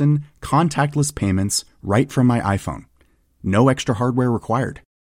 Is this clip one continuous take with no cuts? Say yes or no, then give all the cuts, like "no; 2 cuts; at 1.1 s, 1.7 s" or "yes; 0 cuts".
yes; 0 cuts